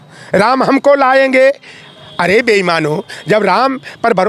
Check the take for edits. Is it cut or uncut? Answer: uncut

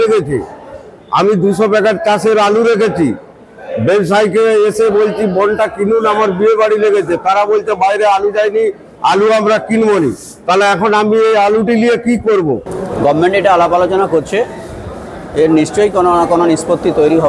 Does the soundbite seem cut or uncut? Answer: cut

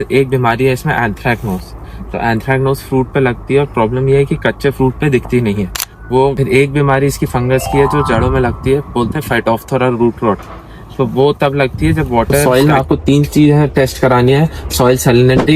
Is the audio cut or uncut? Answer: cut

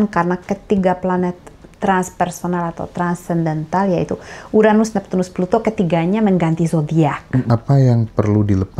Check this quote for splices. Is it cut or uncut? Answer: cut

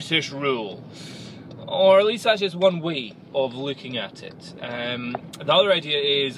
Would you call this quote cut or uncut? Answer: uncut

